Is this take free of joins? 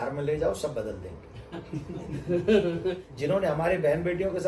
no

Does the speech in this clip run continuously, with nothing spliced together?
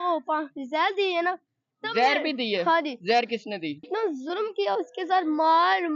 no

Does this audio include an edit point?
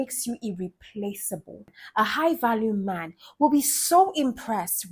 yes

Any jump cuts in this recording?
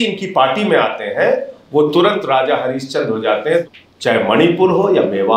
yes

